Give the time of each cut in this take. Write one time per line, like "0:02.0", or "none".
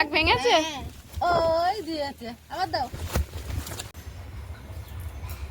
0:03.9

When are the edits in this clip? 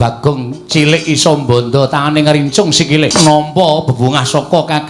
0:03.1

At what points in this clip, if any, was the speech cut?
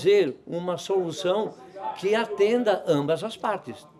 none

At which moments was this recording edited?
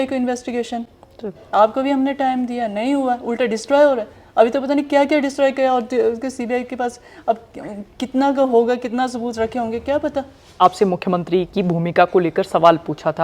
0:10.6

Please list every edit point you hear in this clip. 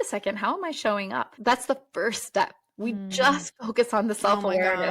0:01.3

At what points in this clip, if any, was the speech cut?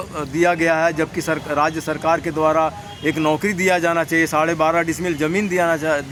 none

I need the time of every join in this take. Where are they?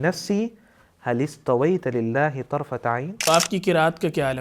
0:03.3

